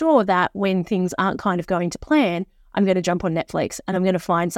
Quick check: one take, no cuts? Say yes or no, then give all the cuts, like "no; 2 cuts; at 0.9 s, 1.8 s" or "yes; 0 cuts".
yes; 0 cuts